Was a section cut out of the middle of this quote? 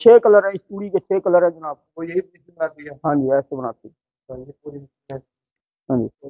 no; 0 cuts

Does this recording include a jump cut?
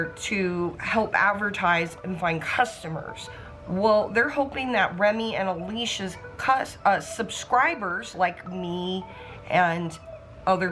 no; 0 cuts

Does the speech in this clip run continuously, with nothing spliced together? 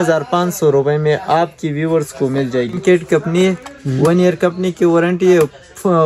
no; 1 cut; at 2.8 s

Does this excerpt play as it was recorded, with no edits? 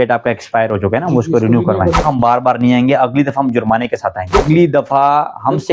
no; 2 cuts; at 2.0 s, 4.4 s

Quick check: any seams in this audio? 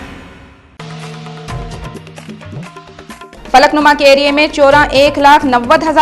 yes; 1 cut; at 2.9 s

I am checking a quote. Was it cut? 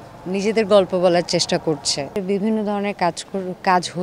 yes; 1 cut; at 2.2 s

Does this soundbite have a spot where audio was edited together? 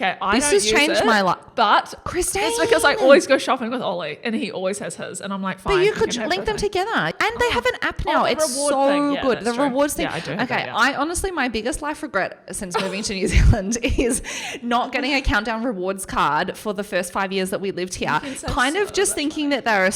yes; 1 cut; at 7.1 s

